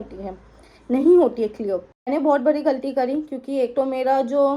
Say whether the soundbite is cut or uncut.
cut